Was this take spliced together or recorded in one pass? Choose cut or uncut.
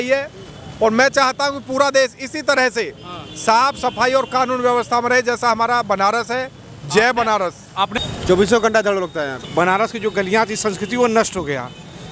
cut